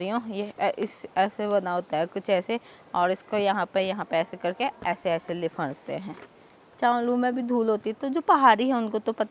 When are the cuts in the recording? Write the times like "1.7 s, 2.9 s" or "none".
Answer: none

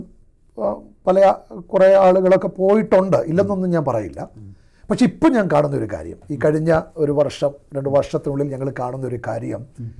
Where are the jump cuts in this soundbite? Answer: none

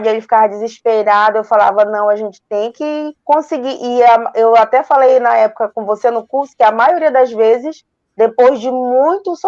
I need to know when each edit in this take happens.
none

